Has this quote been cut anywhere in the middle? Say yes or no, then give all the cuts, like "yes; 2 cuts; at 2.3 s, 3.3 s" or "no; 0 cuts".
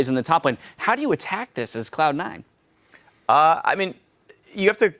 no; 0 cuts